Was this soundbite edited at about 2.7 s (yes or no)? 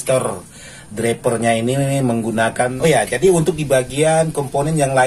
yes